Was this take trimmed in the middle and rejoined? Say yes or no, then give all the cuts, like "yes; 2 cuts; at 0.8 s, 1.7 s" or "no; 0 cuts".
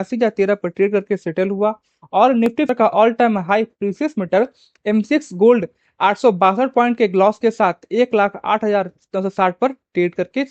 yes; 1 cut; at 2.7 s